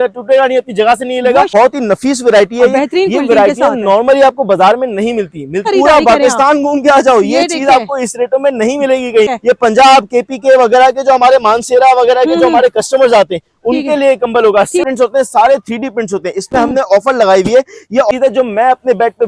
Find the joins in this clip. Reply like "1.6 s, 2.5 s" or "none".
1.5 s, 5.7 s, 9.3 s, 14.9 s, 18.1 s